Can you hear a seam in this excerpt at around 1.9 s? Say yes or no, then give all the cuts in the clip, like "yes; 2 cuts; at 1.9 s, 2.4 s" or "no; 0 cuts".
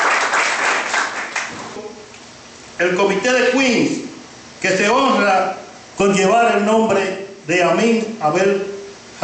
yes; 1 cut; at 1.9 s